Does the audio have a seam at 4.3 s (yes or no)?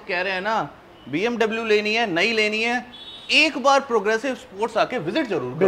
no